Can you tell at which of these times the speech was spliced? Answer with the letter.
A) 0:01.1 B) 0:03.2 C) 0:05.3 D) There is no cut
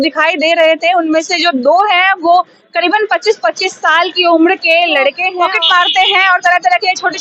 C